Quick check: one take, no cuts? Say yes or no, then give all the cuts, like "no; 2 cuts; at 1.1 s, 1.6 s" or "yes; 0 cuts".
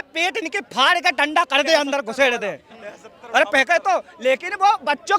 yes; 0 cuts